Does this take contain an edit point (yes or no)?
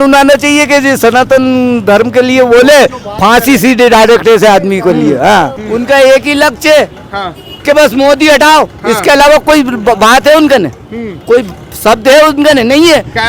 yes